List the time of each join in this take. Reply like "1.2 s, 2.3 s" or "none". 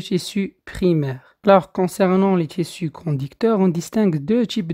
1.2 s

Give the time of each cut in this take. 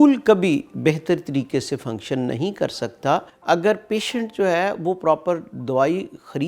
3.3 s

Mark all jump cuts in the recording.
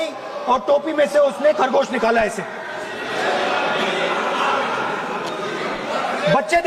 none

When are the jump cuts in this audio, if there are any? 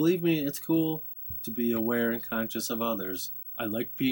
none

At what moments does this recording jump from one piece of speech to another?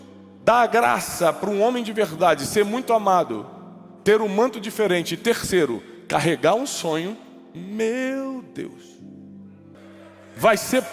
9.7 s

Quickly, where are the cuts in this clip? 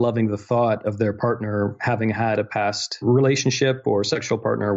3.0 s

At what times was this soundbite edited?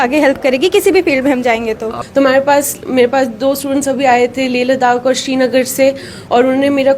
1.9 s

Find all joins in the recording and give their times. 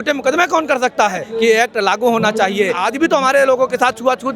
1.3 s, 2.8 s

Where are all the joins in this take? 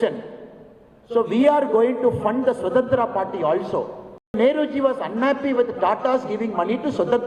4.4 s

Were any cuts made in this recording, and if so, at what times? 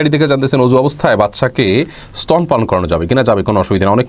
none

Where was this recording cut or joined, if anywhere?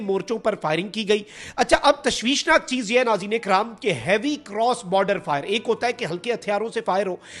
1.4 s

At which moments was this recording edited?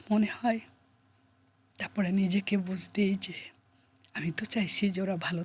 none

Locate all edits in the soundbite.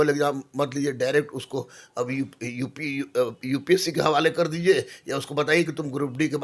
none

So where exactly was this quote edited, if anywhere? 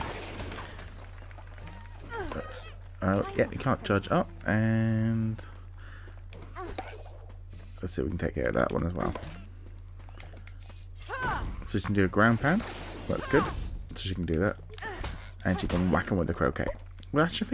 13.2 s

